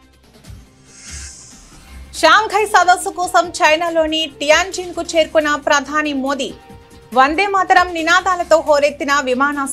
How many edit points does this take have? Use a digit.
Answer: 1